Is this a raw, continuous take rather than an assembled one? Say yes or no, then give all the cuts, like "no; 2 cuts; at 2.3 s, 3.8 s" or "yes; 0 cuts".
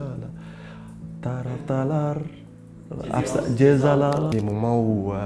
no; 1 cut; at 4.3 s